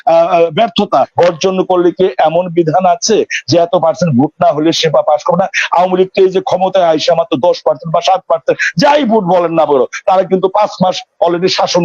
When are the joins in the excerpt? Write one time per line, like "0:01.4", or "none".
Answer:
0:01.1